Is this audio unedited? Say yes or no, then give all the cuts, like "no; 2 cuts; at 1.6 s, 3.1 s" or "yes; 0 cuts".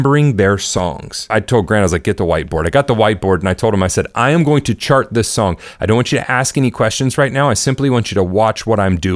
no; 1 cut; at 1.2 s